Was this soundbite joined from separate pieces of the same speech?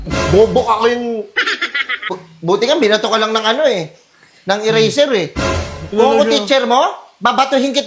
yes; 1 cut; at 2.2 s

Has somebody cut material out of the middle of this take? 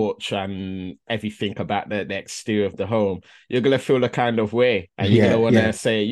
yes; 1 cut; at 4.9 s

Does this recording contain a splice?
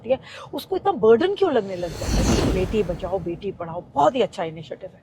yes; 1 cut; at 2.1 s

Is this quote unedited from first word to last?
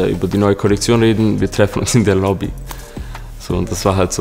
yes; 0 cuts

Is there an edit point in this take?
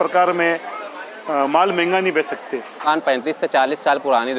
yes; 1 cut; at 2.8 s

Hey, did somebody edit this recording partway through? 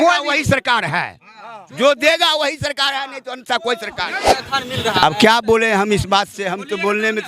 yes; 1 cut; at 4.5 s

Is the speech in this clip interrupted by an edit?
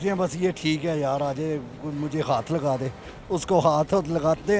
no; 0 cuts

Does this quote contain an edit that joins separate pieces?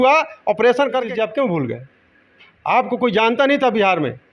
yes; 1 cut; at 1.1 s

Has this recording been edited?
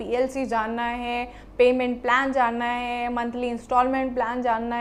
no; 0 cuts

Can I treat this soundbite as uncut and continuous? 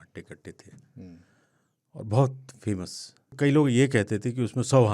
no; 1 cut; at 3.3 s

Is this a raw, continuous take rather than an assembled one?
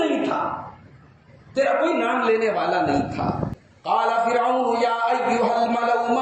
no; 1 cut; at 3.5 s

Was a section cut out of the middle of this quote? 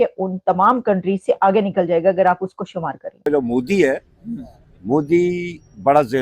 yes; 1 cut; at 3.2 s

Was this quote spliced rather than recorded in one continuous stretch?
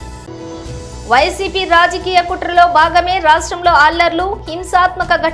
yes; 1 cut; at 0.9 s

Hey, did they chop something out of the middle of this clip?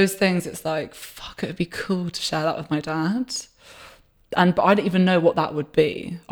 no; 0 cuts

